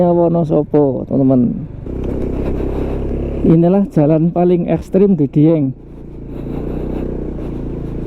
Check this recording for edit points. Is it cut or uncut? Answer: cut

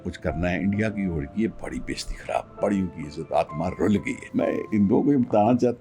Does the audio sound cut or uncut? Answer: cut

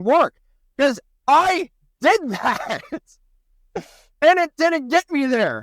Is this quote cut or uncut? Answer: uncut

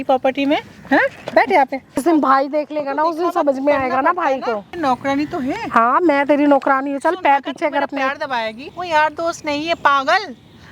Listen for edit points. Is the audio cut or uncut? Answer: cut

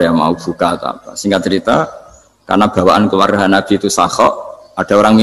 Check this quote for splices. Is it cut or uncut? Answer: uncut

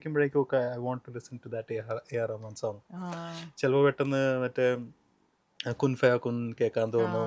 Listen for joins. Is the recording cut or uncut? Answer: uncut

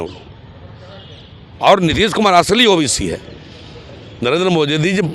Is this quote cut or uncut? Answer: uncut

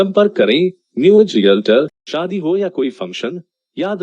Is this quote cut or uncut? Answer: cut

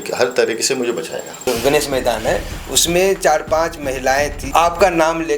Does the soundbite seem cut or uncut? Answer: cut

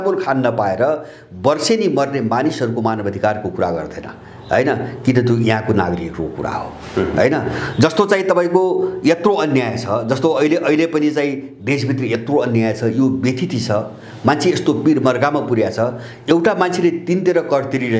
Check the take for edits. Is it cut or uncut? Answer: uncut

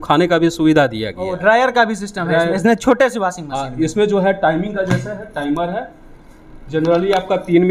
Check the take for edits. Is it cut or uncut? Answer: uncut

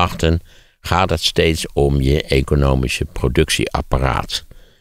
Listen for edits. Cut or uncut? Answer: uncut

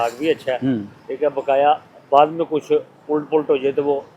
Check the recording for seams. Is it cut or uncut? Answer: uncut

